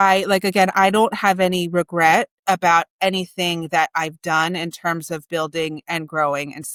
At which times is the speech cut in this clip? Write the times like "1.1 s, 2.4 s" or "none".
none